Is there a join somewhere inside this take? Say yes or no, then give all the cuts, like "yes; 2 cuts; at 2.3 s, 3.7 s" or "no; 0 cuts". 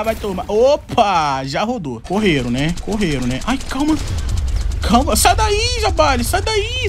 yes; 1 cut; at 1.9 s